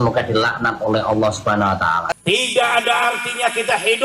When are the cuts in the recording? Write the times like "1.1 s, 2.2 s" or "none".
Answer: 2.1 s

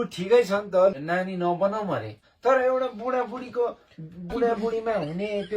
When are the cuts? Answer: 1.0 s, 2.3 s

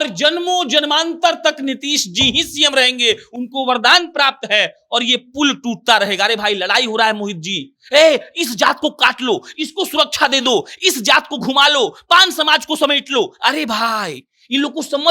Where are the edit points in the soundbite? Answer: none

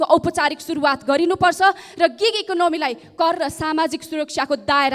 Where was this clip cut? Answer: none

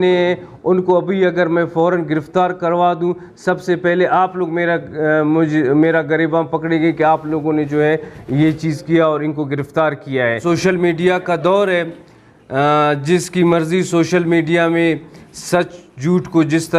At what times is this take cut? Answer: 10.4 s

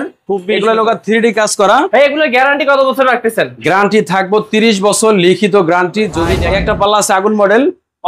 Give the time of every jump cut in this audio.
1.9 s, 6.3 s

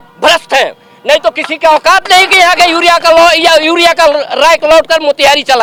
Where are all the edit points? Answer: none

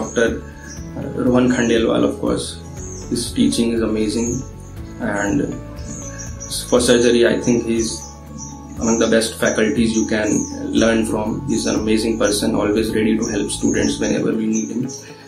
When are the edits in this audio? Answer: none

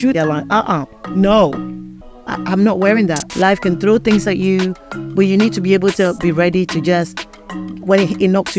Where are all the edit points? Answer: 3.3 s

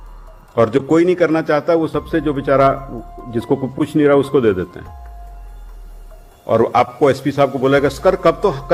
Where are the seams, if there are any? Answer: none

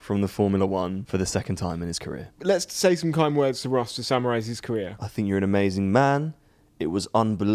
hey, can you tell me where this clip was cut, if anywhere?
1.0 s, 2.3 s, 5.0 s

